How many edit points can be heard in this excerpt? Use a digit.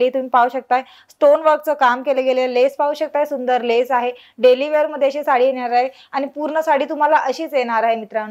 0